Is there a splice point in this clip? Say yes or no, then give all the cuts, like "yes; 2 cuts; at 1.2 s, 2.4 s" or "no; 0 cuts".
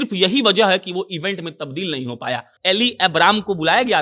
yes; 1 cut; at 2.5 s